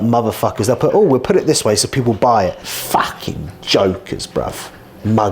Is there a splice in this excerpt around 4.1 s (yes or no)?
no